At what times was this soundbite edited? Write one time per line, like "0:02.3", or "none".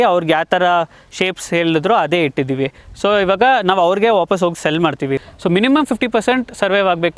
0:05.2